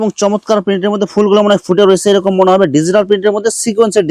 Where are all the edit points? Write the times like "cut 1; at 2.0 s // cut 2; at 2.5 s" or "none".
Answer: none